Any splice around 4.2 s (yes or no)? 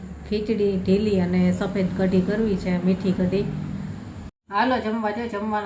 yes